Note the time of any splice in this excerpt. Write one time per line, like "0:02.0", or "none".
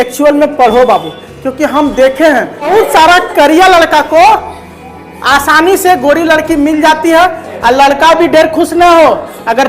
0:02.7
0:07.5